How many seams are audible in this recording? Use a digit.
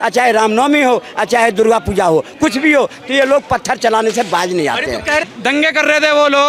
1